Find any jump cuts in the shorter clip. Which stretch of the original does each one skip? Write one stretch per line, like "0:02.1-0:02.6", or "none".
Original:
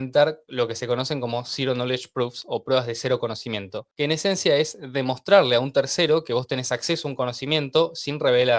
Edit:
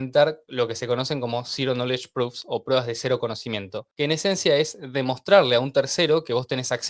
none